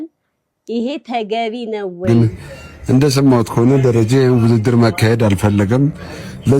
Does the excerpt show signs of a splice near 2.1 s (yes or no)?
yes